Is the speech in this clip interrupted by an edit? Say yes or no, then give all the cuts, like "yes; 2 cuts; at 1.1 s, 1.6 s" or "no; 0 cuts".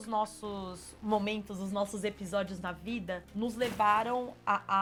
no; 0 cuts